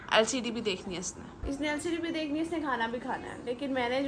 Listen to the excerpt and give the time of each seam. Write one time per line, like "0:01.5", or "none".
none